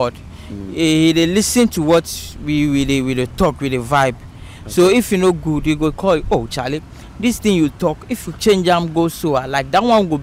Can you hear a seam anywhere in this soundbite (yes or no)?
no